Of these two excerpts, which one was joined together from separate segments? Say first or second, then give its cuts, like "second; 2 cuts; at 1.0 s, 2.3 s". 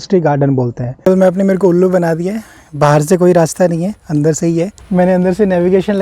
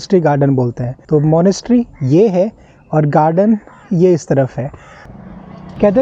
first; 2 cuts; at 0.9 s, 4.8 s